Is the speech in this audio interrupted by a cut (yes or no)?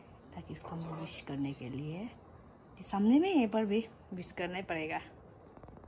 no